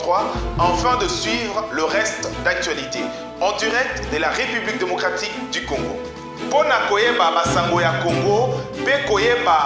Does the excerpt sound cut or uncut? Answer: uncut